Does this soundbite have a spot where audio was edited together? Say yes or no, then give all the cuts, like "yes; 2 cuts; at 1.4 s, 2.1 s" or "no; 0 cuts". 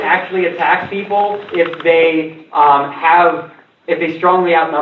no; 0 cuts